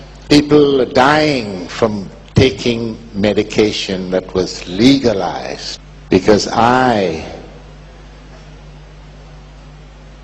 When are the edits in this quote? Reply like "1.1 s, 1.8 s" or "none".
2.7 s